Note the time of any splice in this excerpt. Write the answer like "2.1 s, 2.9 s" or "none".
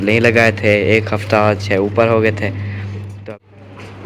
3.1 s

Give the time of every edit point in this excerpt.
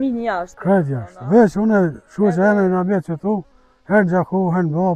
none

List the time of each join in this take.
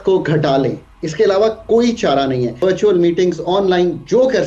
2.6 s

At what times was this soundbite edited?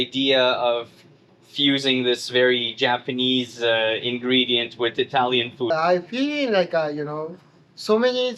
5.7 s

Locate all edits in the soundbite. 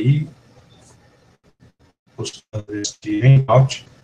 none

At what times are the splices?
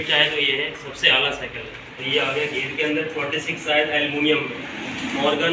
1.9 s

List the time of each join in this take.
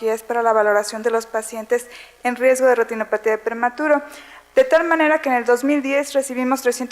4.8 s

